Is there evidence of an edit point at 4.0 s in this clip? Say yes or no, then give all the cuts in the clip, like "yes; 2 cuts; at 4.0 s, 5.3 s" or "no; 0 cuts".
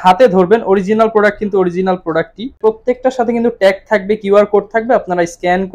no; 1 cut; at 2.6 s